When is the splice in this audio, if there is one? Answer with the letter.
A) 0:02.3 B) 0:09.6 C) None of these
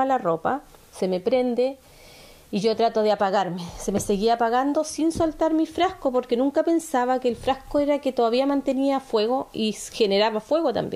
C